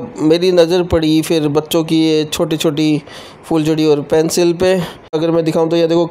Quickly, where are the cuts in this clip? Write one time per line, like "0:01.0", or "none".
0:05.1